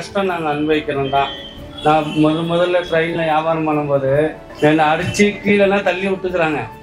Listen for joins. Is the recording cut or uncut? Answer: cut